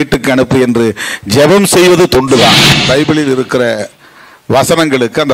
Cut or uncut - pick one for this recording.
cut